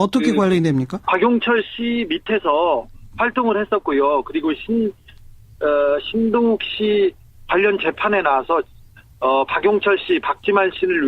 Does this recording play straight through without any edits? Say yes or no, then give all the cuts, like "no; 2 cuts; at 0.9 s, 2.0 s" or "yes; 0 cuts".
yes; 0 cuts